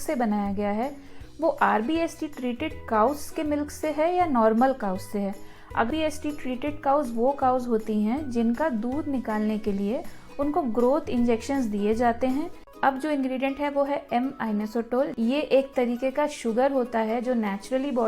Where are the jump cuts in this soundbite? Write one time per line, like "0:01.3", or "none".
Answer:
0:05.9
0:12.6